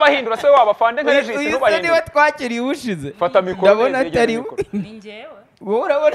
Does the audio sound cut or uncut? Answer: uncut